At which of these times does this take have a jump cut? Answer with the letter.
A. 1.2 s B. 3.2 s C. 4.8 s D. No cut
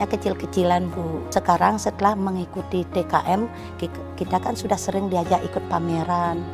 A